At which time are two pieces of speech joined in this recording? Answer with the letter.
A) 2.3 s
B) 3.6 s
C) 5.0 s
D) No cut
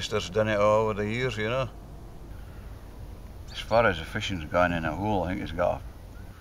A